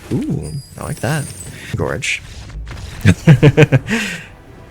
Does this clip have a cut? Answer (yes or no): yes